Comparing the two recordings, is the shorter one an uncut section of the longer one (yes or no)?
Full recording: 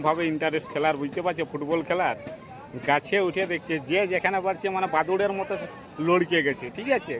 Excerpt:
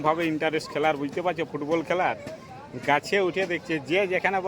yes